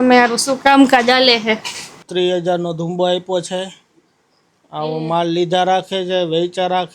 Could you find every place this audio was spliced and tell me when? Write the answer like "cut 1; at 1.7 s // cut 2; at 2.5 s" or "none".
cut 1; at 2.0 s